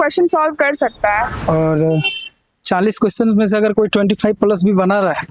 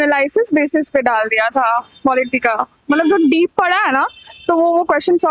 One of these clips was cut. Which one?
first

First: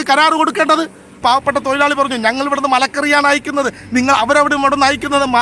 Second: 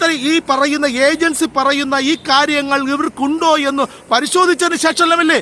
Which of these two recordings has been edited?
first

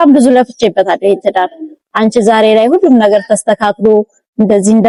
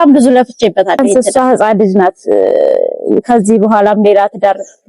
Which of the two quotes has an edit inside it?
second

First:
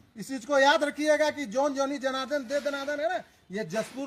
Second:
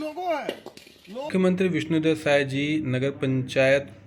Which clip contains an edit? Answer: second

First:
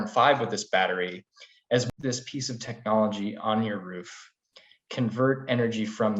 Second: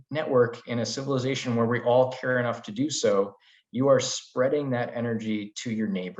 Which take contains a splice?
first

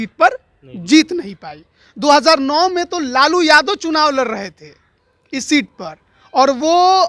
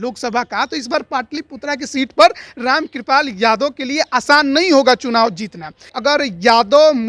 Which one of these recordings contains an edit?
second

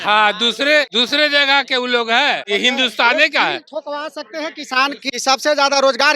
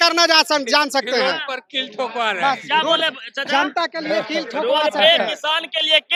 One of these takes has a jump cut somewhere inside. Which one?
first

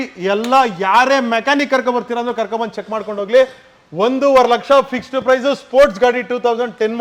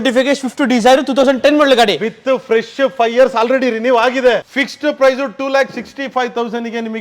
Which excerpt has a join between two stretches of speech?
second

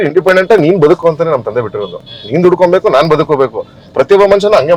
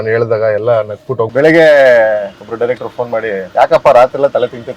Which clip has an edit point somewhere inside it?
second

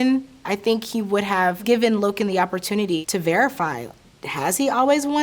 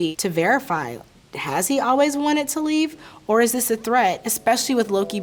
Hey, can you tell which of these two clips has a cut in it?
first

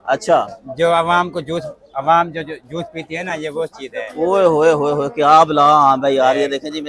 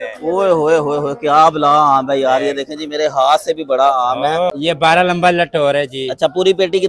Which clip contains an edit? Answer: second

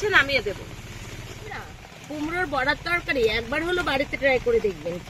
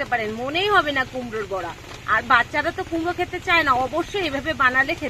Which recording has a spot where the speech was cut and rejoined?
first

